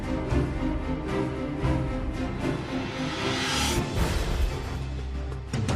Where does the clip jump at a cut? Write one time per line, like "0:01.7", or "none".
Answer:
0:01.3